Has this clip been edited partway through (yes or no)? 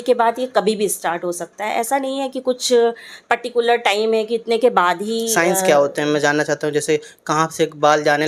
no